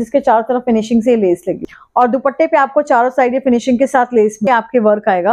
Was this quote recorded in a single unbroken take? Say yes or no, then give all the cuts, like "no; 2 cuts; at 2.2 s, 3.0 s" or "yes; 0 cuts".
no; 2 cuts; at 1.7 s, 4.5 s